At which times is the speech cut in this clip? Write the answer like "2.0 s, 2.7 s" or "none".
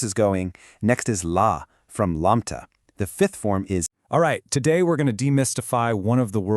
3.3 s, 3.9 s